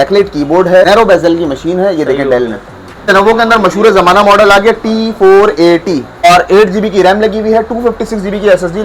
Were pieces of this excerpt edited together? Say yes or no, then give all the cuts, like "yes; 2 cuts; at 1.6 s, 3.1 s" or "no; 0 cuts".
yes; 3 cuts; at 0.9 s, 3.1 s, 6.2 s